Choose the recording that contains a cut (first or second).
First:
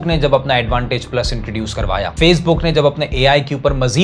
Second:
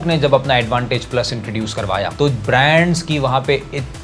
second